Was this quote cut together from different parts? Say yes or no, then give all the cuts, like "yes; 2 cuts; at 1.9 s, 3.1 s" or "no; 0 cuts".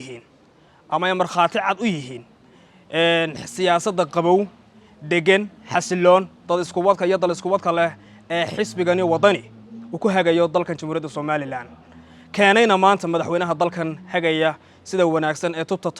no; 0 cuts